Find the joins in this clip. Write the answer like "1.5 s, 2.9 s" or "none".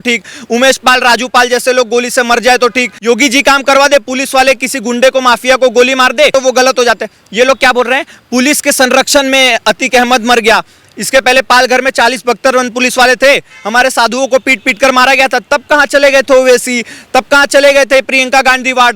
2.9 s, 6.3 s

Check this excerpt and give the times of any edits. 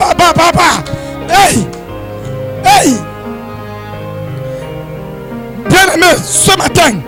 none

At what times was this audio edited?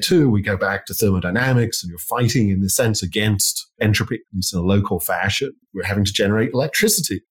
5.6 s

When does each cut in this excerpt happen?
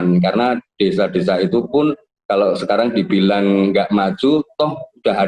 2.1 s

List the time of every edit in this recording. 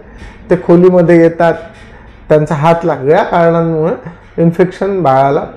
3.0 s

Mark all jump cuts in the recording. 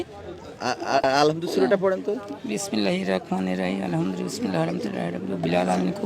1.0 s

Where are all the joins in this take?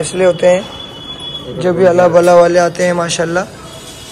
none

